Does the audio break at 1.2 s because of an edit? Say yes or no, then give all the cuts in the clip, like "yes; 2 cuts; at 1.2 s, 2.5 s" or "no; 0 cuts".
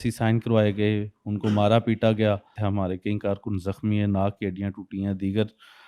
no; 1 cut; at 2.6 s